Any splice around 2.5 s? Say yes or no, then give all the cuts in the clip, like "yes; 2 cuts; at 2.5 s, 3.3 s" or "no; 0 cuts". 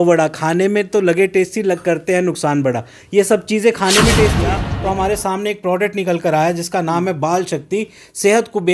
no; 1 cut; at 4.6 s